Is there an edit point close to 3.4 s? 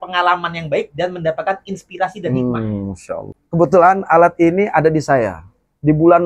yes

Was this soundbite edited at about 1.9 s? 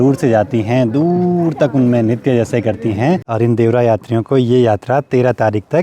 no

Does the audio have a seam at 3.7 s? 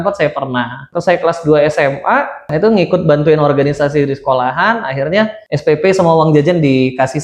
no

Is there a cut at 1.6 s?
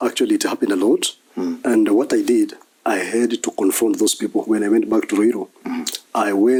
no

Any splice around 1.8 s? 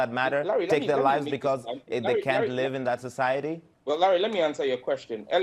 no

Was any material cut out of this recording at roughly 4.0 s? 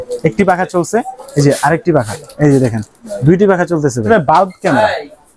yes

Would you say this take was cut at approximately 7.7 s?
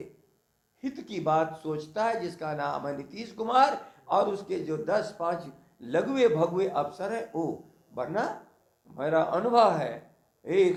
no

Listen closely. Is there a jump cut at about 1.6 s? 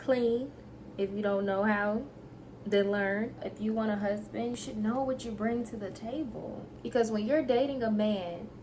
no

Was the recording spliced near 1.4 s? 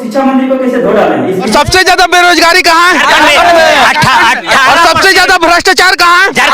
yes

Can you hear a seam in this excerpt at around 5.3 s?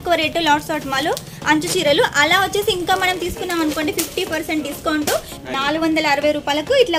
yes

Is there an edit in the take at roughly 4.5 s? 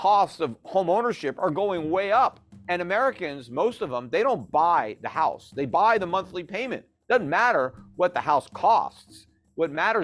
no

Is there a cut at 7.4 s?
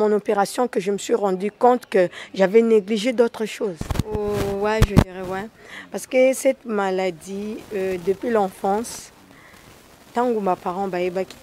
no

